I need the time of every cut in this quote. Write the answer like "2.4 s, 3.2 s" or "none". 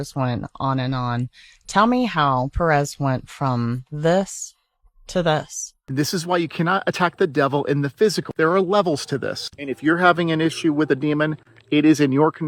5.8 s